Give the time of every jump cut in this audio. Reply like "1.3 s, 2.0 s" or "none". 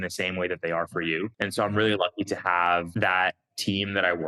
1.3 s, 2.9 s